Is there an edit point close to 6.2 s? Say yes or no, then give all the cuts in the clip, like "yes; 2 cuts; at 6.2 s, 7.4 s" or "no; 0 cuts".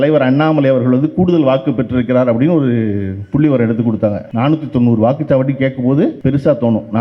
yes; 2 cuts; at 4.2 s, 6.2 s